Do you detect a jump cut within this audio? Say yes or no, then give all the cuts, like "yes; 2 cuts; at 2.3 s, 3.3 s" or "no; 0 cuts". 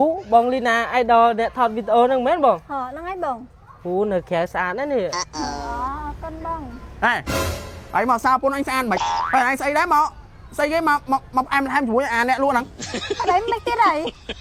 no; 0 cuts